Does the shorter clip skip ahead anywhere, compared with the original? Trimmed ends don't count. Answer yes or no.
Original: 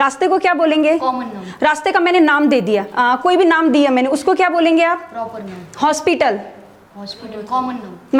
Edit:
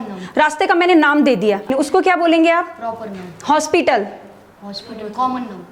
yes